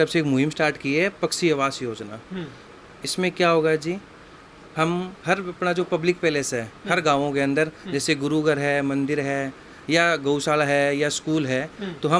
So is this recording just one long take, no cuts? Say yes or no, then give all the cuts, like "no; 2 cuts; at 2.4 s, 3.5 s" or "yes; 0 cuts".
yes; 0 cuts